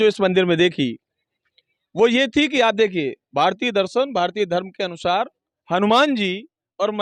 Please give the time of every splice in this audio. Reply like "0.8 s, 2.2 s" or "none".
none